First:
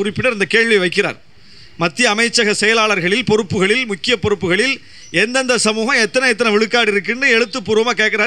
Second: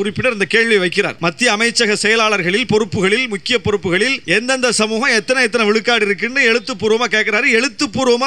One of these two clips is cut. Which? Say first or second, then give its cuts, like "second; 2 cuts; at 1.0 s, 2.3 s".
second; 2 cuts; at 1.1 s, 4.2 s